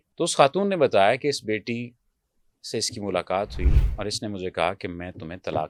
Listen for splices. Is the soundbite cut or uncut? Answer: uncut